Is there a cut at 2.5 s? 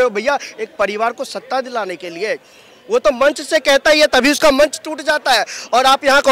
no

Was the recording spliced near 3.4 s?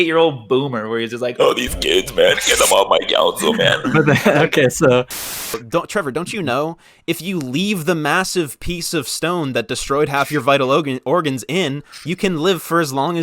no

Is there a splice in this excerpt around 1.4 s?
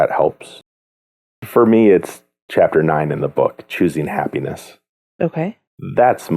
yes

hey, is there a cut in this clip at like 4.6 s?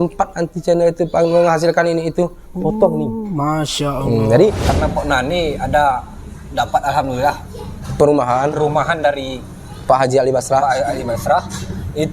yes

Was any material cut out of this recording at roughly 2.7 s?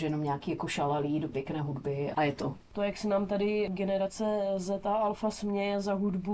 yes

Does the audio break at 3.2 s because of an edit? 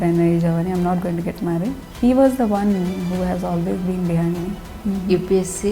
no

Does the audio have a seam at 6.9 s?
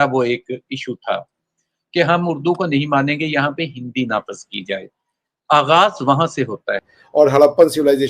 yes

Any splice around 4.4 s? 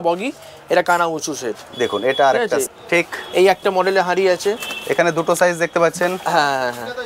no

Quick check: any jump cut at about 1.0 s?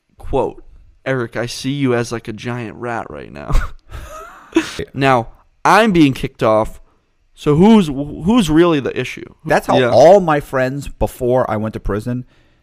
no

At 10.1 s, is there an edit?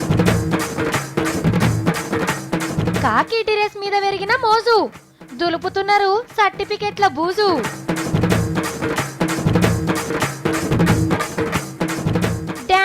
yes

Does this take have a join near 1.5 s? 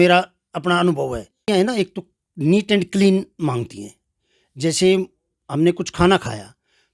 yes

